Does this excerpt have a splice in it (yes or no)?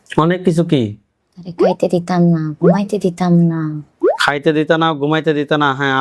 no